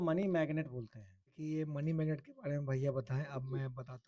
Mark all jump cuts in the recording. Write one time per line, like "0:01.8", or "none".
0:01.4